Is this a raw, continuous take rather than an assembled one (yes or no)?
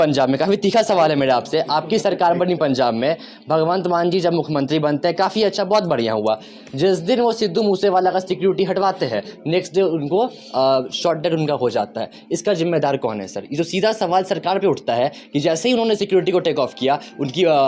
yes